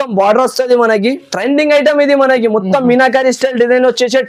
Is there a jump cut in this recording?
no; 0 cuts

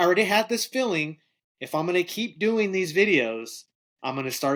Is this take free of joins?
yes; 0 cuts

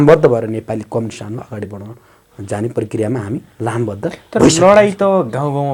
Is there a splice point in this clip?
no; 0 cuts

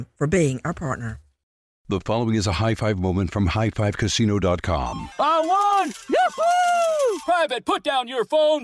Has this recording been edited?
yes; 1 cut; at 1.8 s

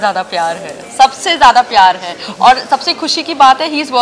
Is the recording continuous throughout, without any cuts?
yes; 0 cuts

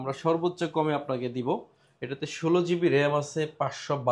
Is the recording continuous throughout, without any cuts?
yes; 0 cuts

